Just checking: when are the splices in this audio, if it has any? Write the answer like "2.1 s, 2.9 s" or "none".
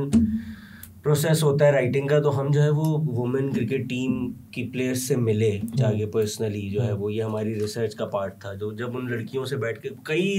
none